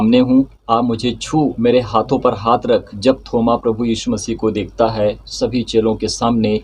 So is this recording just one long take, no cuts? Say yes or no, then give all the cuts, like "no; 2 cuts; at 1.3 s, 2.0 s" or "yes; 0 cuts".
no; 1 cut; at 1.5 s